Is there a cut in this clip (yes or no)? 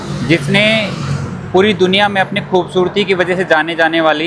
no